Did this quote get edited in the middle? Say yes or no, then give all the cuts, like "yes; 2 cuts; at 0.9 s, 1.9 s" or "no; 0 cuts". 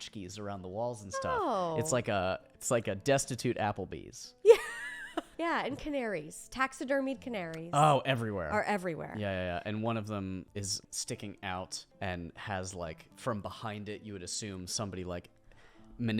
yes; 5 cuts; at 2.5 s, 5.3 s, 10.6 s, 11.8 s, 13.1 s